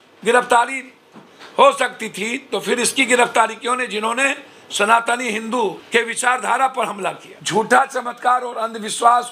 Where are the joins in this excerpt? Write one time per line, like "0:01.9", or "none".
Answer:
0:05.8
0:07.3